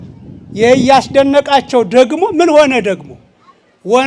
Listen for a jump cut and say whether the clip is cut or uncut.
uncut